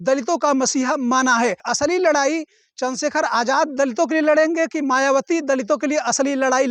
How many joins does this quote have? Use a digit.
1